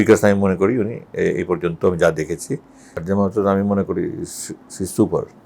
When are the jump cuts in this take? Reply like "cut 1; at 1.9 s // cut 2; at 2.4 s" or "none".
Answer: cut 1; at 3.0 s